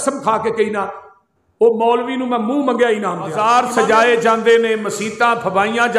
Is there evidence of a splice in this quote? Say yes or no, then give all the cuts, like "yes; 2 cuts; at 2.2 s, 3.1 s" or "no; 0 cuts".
yes; 1 cut; at 3.4 s